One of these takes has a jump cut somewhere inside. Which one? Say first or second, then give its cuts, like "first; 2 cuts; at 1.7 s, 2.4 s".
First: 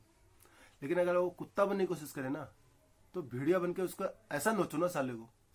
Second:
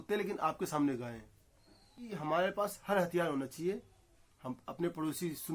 second; 1 cut; at 2.1 s